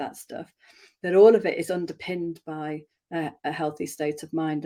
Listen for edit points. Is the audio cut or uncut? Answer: uncut